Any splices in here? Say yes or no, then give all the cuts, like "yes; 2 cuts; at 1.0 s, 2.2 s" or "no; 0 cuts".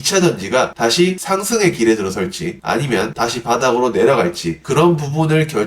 yes; 2 cuts; at 3.1 s, 4.5 s